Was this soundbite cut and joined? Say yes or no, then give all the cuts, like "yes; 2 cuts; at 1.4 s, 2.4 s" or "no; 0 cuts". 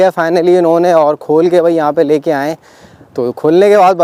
no; 0 cuts